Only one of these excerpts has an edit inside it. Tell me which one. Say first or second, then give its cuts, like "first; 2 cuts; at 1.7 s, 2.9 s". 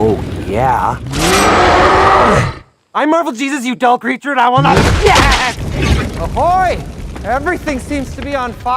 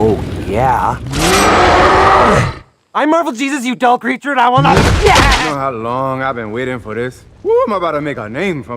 second; 2 cuts; at 5.5 s, 7.2 s